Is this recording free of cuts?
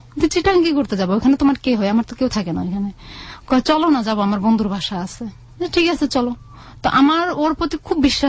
yes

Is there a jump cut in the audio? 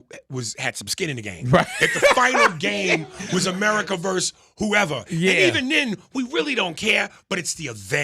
no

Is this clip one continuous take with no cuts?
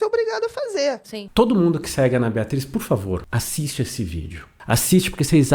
no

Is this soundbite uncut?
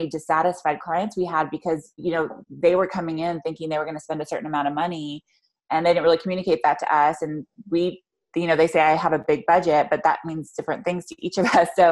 yes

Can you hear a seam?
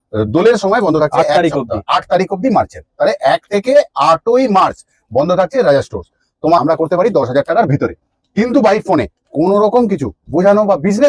yes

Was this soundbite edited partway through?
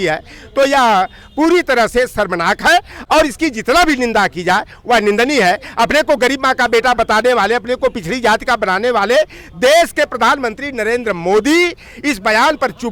no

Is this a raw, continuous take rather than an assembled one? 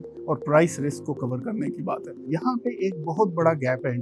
no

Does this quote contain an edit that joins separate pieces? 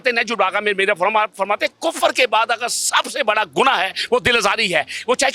no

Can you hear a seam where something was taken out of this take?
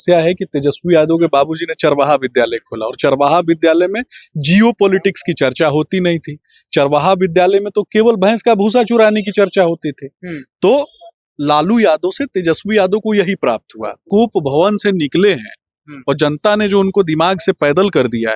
yes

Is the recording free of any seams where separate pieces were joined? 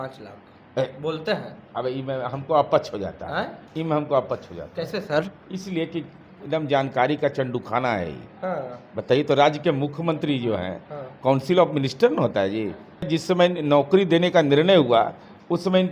no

